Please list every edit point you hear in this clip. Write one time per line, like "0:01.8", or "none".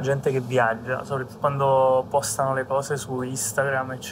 0:01.4